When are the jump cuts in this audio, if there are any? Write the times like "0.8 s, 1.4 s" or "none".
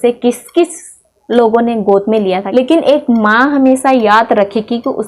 2.4 s